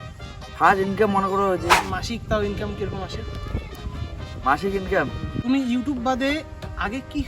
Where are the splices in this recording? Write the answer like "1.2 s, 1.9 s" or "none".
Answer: 1.8 s, 5.3 s